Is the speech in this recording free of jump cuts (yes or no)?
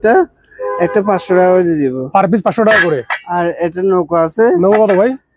yes